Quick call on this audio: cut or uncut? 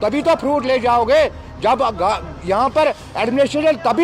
uncut